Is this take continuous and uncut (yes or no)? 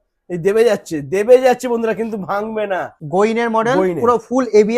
no